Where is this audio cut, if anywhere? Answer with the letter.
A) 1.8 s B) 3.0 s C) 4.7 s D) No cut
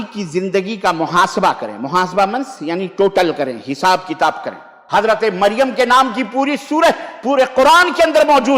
C